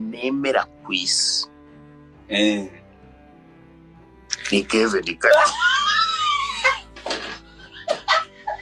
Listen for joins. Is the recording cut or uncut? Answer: uncut